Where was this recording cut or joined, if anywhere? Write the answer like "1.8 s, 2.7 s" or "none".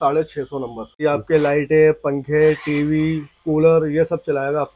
1.0 s